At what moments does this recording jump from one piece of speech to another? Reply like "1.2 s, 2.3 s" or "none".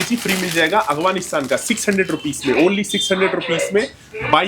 none